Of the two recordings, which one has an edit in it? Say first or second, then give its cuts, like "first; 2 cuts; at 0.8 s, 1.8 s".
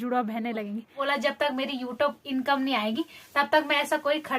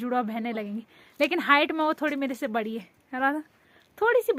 first; 1 cut; at 1.0 s